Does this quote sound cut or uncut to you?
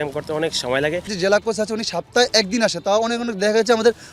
cut